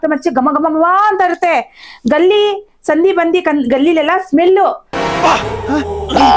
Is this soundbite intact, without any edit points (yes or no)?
yes